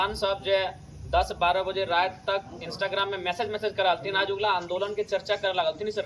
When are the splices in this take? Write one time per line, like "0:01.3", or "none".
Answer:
none